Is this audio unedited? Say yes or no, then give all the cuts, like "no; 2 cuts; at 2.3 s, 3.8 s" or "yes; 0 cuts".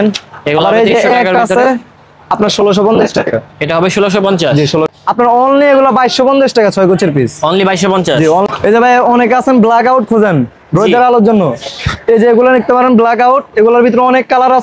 no; 2 cuts; at 4.9 s, 8.5 s